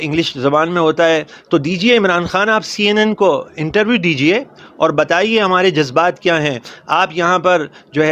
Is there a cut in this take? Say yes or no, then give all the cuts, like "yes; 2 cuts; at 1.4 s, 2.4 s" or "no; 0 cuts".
no; 0 cuts